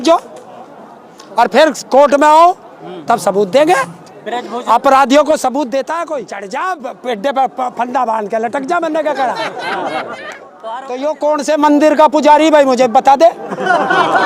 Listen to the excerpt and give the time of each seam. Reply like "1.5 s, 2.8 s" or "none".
6.2 s, 10.6 s